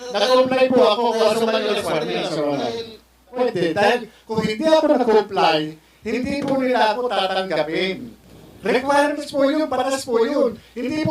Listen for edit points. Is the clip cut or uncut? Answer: cut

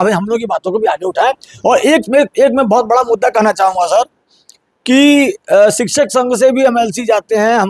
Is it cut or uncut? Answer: uncut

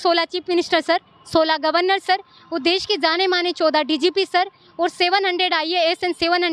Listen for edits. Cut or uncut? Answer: uncut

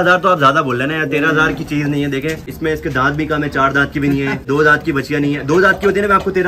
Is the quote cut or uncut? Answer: cut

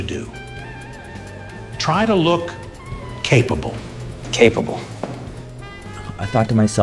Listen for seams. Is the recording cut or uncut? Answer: uncut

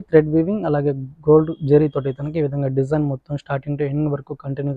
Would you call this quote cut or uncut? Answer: uncut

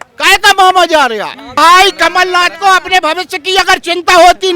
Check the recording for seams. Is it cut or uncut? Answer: cut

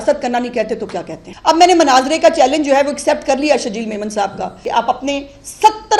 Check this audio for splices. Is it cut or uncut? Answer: cut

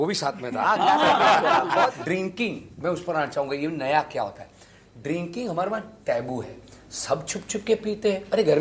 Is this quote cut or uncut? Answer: cut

